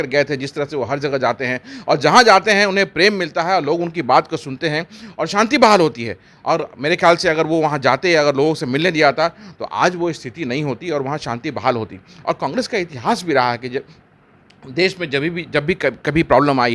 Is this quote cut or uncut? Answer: uncut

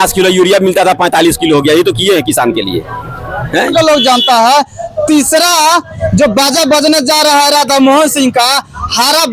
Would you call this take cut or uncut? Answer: cut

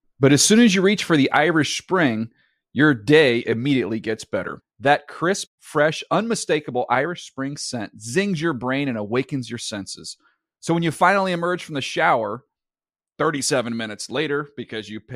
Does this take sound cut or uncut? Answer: uncut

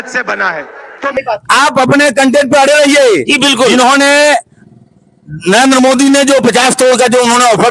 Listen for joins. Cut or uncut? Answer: cut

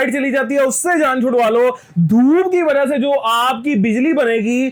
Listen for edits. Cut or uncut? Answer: uncut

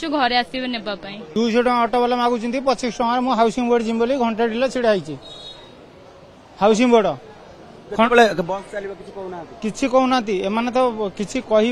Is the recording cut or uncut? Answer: cut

